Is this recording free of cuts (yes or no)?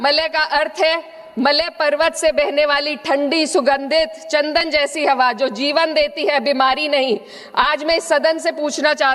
yes